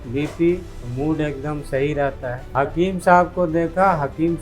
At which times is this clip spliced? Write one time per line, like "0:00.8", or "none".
0:02.4